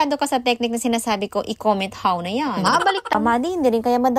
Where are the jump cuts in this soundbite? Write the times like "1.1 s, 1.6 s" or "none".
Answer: 3.1 s